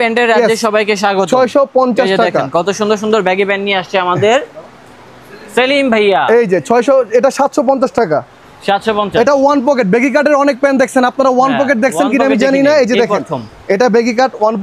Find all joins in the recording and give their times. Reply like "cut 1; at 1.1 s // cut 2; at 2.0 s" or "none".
none